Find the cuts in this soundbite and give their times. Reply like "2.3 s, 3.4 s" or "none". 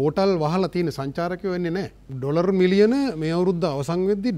2.0 s